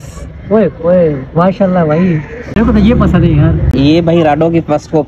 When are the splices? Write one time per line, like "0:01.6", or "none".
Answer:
0:02.6
0:03.7